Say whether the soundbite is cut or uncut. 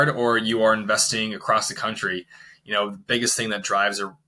uncut